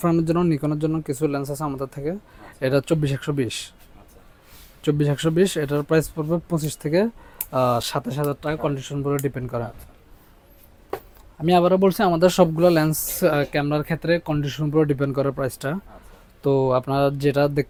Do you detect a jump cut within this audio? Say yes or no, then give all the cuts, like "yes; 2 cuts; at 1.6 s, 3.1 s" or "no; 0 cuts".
no; 0 cuts